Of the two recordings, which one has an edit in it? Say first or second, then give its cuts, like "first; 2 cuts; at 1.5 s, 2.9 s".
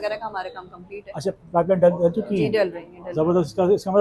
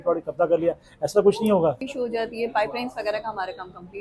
second; 1 cut; at 1.9 s